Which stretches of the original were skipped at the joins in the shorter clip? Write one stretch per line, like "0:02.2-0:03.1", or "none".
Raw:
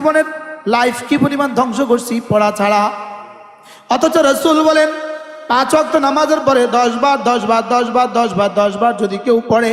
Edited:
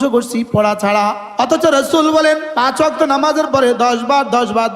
0:03.0-0:03.7
0:05.0-0:05.4